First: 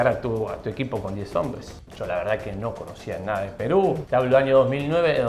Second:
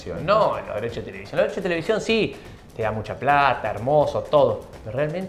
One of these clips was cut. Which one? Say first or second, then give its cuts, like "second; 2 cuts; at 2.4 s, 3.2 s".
first; 2 cuts; at 1.7 s, 4.0 s